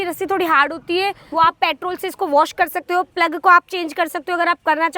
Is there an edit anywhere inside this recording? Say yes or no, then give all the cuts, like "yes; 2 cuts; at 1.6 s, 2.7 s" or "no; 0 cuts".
yes; 1 cut; at 1.2 s